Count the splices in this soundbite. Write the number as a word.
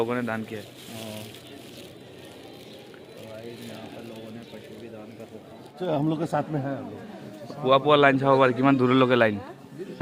zero